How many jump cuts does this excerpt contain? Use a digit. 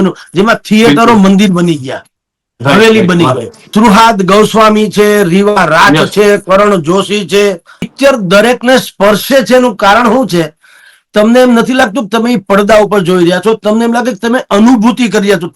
2